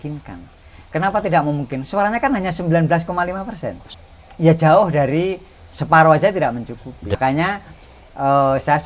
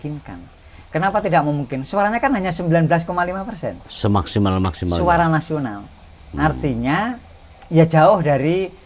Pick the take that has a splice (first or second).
first